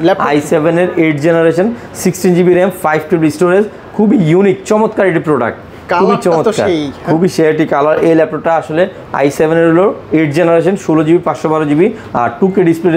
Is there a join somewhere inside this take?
no; 0 cuts

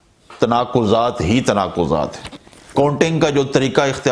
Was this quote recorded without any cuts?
yes; 0 cuts

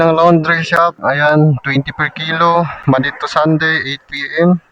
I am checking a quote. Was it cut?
yes; 1 cut; at 1.0 s

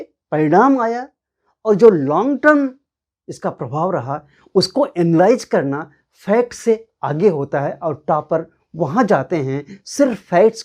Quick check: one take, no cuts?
yes; 0 cuts

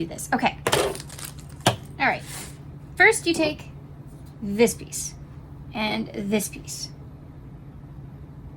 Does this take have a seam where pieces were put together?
no; 0 cuts

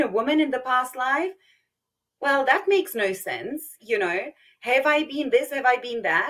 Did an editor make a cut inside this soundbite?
no; 0 cuts

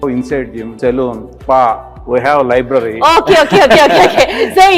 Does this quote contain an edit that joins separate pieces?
no; 0 cuts

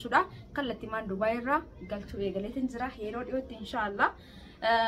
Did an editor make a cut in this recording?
no; 0 cuts

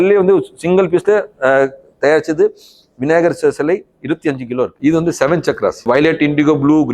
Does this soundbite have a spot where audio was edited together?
yes; 2 cuts; at 4.7 s, 5.9 s

